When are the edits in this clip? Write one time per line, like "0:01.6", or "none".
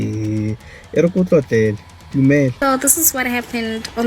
0:02.6

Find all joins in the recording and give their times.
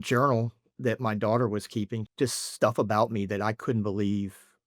0:02.0

